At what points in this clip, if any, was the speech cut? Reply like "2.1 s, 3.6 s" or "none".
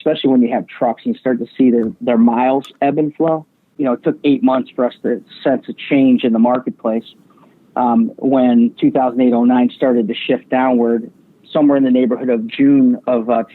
3.6 s